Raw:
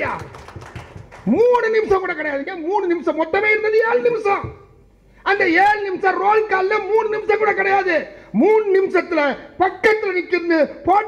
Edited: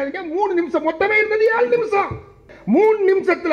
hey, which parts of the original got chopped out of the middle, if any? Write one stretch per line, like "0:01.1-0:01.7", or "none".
0:04.8-0:08.2